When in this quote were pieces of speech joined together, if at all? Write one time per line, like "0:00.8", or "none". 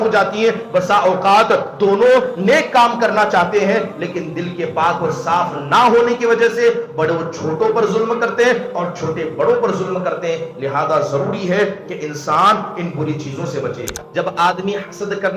0:14.0